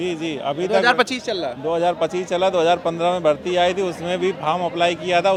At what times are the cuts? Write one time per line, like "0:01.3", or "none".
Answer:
none